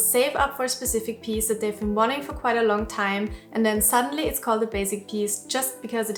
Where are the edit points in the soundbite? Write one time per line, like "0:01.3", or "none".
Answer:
none

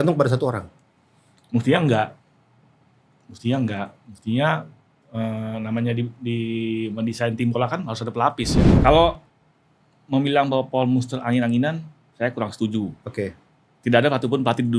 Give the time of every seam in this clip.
0:08.6

